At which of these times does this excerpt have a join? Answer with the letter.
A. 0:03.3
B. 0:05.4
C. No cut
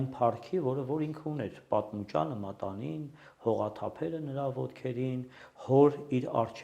C